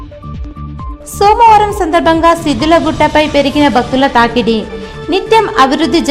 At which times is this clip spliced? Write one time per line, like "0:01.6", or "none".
none